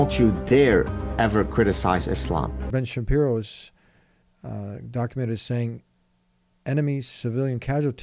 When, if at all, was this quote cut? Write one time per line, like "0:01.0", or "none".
0:02.6